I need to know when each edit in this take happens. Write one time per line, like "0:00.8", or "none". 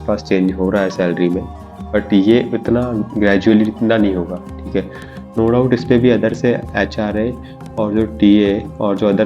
none